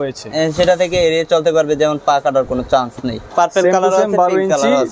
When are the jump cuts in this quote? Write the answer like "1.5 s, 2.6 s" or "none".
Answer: 3.2 s